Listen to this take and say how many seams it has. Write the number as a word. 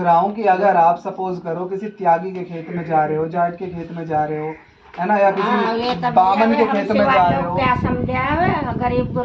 zero